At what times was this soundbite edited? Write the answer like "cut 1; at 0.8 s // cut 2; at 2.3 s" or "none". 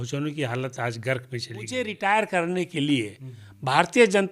cut 1; at 1.7 s